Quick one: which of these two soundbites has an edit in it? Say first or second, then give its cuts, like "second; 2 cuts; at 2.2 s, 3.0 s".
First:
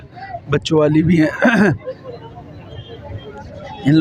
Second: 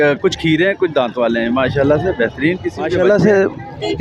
second; 1 cut; at 2.9 s